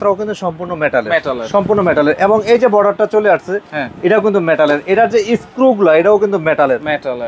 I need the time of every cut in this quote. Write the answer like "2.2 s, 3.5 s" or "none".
none